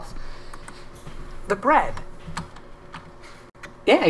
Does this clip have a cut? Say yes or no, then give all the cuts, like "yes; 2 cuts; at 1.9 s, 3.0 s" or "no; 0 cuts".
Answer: yes; 1 cut; at 0.9 s